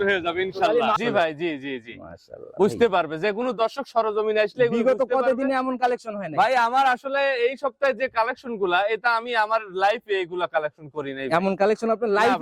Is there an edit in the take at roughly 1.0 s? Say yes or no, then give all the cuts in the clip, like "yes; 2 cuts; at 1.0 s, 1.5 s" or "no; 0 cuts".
yes; 1 cut; at 1.0 s